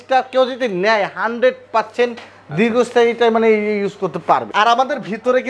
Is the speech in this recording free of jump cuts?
no; 1 cut; at 4.5 s

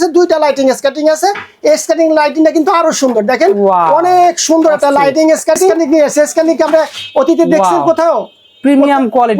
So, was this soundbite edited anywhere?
yes; 1 cut; at 5.8 s

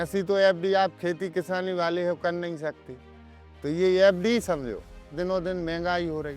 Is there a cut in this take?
yes; 1 cut; at 5.1 s

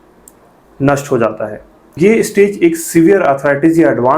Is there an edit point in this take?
yes; 1 cut; at 2.0 s

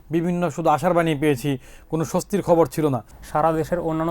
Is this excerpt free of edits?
no; 1 cut; at 3.1 s

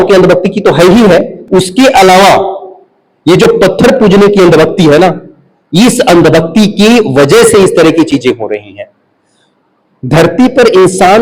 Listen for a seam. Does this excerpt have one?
no; 0 cuts

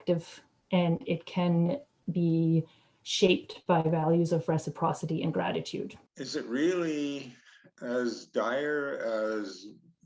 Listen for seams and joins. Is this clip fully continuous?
no; 1 cut; at 6.0 s

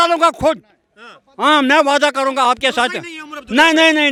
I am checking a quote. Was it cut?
no; 0 cuts

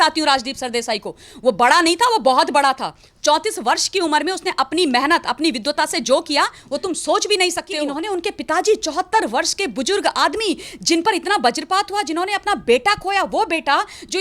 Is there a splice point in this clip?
yes; 1 cut; at 7.8 s

